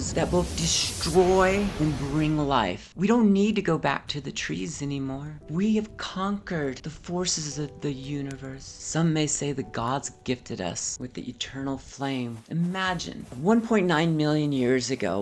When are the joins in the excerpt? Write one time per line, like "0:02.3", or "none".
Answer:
0:02.8
0:12.4